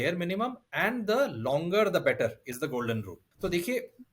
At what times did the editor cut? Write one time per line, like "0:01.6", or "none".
0:03.2